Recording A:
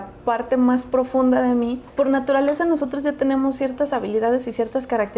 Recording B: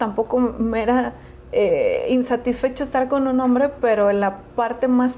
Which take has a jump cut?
A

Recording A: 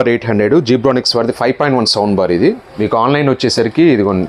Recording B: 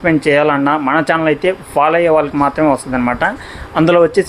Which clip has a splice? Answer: A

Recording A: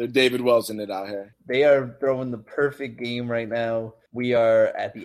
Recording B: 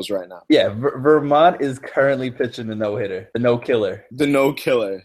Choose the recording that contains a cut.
A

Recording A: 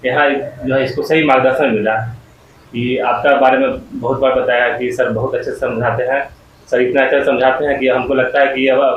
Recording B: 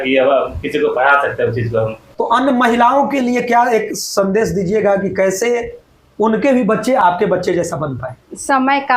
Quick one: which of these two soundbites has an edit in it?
B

